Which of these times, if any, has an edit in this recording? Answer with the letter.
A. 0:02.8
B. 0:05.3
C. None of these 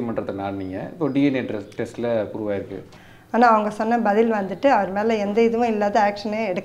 A